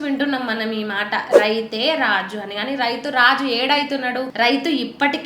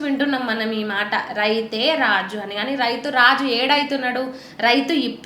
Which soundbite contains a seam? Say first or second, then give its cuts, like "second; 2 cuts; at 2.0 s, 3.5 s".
first; 1 cut; at 4.3 s